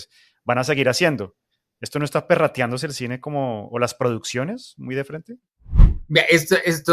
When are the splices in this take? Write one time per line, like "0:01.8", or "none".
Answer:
0:06.0

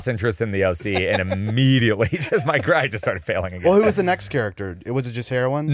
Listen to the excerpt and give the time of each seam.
none

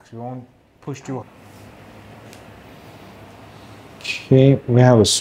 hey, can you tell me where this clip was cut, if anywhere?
0:01.2

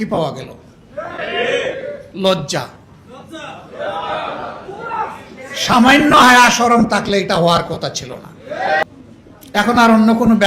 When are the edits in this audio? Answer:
0:08.8

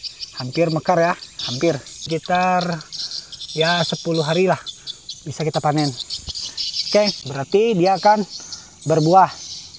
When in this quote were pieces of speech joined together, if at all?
0:02.0
0:07.3

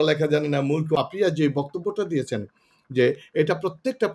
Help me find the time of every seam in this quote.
0:01.0

